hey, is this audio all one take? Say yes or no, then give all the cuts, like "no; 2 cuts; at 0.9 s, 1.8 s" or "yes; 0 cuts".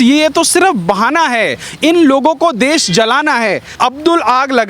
no; 1 cut; at 3.7 s